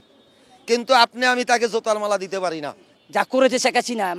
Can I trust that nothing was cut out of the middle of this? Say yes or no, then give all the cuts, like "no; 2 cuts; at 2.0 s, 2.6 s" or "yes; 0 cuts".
no; 1 cut; at 2.9 s